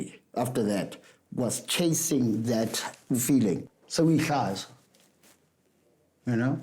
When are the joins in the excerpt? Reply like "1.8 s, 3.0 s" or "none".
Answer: 3.7 s